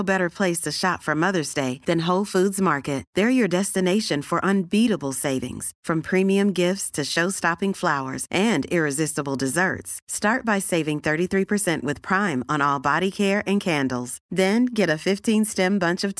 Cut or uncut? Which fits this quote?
uncut